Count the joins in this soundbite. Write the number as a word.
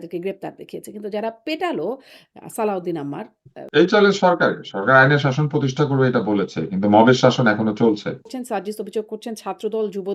two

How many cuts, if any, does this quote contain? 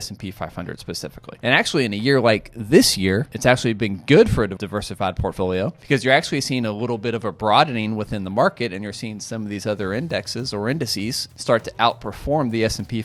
five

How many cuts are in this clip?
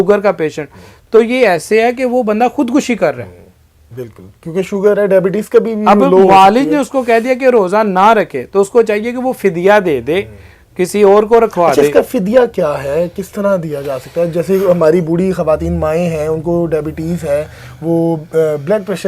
zero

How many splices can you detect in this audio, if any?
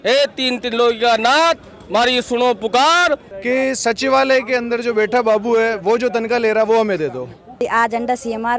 two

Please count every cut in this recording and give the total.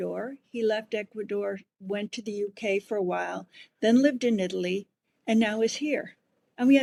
zero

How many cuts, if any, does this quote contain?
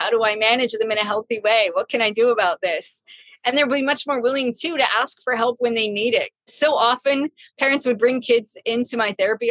one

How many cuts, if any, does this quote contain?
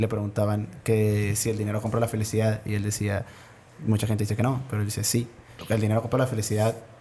one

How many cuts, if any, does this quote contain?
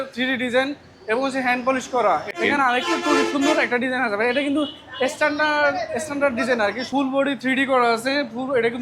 two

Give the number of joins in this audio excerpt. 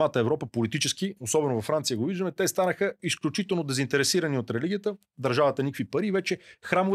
zero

